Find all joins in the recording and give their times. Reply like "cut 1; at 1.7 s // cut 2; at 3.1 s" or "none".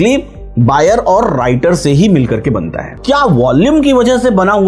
cut 1; at 3.0 s